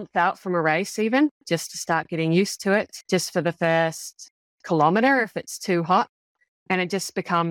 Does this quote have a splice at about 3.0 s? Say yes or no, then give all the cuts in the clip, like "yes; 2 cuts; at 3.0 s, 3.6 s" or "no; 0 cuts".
yes; 1 cut; at 3.0 s